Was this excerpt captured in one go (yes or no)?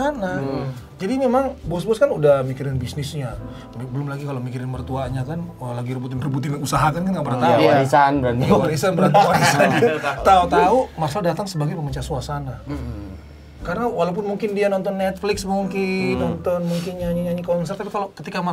yes